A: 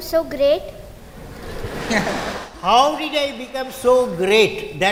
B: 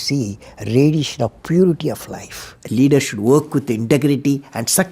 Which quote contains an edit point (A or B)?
B